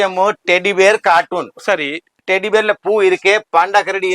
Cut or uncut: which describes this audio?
cut